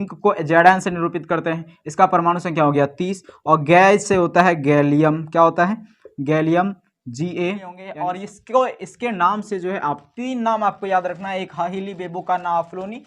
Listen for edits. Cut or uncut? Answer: cut